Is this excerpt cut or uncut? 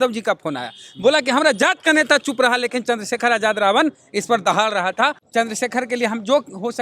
cut